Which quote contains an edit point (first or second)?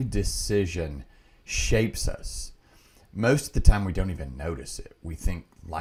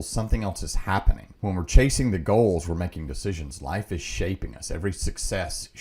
second